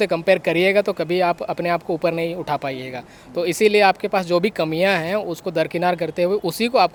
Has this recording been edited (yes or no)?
no